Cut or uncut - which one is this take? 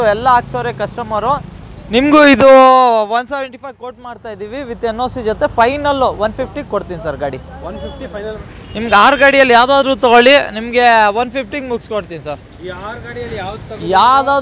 cut